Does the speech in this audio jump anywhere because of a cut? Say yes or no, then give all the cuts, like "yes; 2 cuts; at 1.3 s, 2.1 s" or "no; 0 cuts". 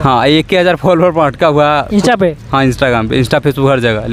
no; 0 cuts